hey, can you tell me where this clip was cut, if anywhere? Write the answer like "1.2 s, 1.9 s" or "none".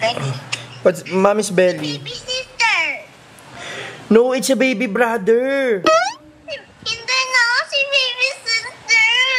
none